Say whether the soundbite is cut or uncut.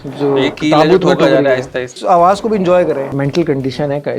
cut